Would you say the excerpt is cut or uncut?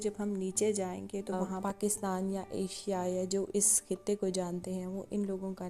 cut